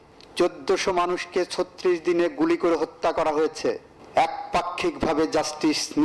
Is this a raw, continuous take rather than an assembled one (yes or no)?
no